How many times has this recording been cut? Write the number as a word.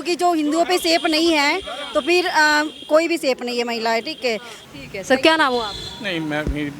one